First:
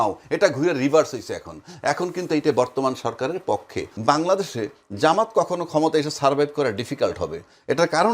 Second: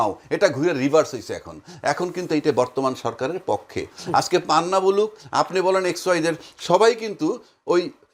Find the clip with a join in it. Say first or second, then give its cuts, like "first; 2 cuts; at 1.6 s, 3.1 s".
first; 1 cut; at 3.9 s